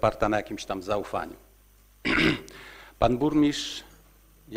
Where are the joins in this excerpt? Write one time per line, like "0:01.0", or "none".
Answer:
none